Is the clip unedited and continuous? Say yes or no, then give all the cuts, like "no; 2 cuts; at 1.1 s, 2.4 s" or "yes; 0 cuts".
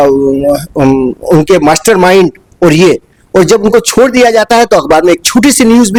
yes; 0 cuts